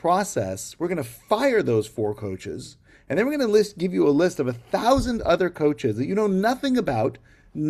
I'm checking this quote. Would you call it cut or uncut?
uncut